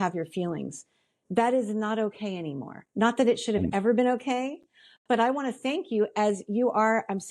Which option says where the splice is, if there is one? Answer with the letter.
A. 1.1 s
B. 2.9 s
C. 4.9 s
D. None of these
D